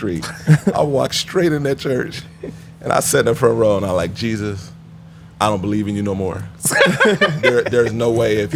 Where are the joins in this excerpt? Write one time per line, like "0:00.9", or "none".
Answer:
none